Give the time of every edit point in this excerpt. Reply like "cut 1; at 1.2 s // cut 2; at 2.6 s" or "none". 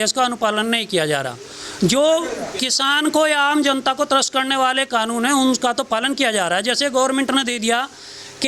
none